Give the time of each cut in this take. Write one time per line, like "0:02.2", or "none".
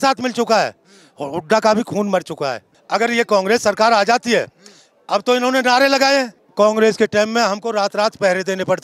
0:02.7
0:06.4